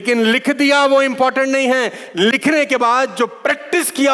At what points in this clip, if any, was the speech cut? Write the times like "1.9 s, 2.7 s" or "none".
none